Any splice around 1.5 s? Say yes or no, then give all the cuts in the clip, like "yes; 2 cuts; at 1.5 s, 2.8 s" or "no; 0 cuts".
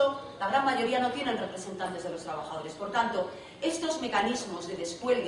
no; 1 cut; at 3.1 s